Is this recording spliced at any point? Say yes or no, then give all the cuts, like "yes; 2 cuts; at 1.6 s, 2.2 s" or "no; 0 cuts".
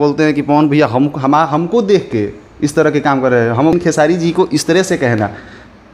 yes; 1 cut; at 3.7 s